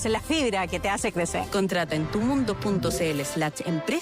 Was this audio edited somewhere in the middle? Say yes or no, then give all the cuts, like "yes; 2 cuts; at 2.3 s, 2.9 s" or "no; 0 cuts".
yes; 1 cut; at 1.7 s